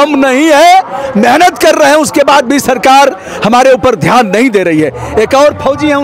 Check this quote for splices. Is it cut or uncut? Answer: uncut